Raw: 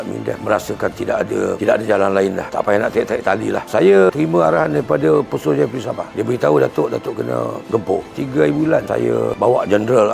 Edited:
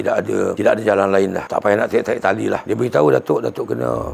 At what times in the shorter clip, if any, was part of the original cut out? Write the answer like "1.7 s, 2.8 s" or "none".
2.6 s